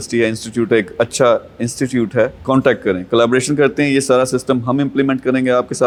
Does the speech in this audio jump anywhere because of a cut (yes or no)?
no